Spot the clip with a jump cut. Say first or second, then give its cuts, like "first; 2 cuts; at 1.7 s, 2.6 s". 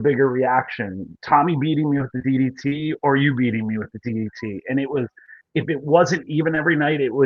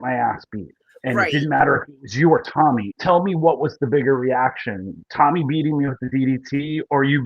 second; 1 cut; at 2.9 s